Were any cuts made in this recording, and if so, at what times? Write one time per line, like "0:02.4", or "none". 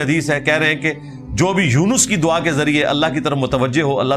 none